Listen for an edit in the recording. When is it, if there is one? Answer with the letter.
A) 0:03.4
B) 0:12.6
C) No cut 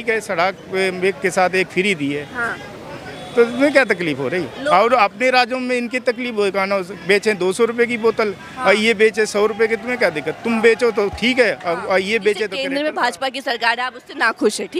B